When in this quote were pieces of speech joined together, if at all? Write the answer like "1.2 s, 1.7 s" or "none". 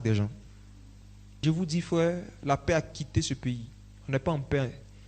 1.1 s